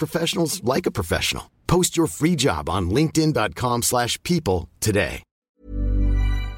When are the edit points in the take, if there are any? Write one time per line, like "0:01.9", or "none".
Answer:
0:05.3